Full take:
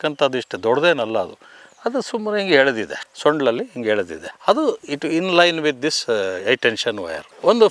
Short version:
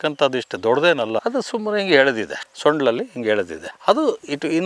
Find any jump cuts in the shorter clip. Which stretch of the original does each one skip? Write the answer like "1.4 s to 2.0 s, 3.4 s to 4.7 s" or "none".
1.2 s to 1.8 s